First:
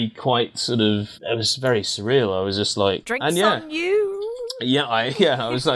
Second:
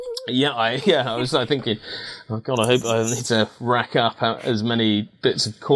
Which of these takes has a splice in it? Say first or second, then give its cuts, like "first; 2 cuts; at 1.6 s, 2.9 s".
first; 2 cuts; at 1.1 s, 3.1 s